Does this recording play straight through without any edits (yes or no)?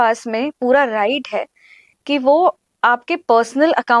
yes